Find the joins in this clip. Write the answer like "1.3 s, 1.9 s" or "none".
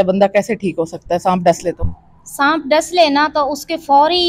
none